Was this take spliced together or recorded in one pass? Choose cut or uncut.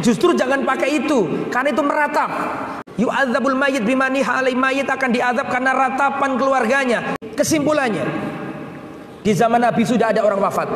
cut